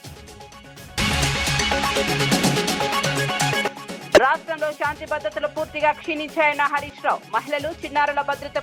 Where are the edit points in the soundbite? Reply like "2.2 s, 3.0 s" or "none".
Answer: 0.9 s